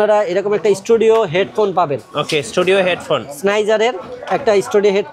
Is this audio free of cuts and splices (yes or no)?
yes